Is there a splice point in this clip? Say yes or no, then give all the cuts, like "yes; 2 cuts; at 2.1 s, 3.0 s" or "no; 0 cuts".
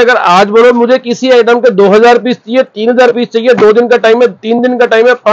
no; 0 cuts